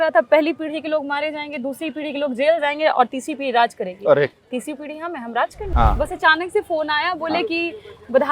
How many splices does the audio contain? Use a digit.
2